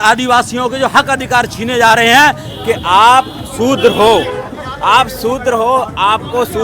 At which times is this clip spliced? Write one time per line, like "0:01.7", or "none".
0:02.5